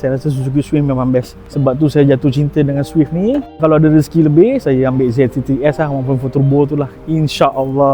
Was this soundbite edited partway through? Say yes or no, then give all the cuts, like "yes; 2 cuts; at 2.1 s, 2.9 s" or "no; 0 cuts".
yes; 2 cuts; at 1.4 s, 3.6 s